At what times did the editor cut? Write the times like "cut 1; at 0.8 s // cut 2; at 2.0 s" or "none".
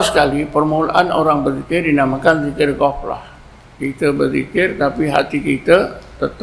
none